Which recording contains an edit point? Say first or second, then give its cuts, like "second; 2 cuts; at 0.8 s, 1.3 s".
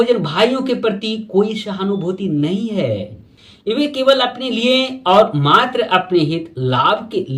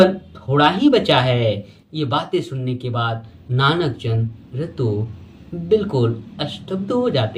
first; 1 cut; at 3.8 s